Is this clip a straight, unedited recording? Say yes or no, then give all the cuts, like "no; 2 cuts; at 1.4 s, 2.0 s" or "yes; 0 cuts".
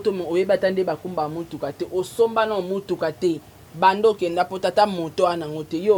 yes; 0 cuts